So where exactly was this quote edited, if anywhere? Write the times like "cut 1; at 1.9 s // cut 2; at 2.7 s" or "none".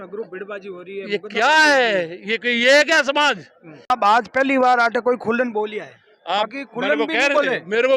cut 1; at 3.9 s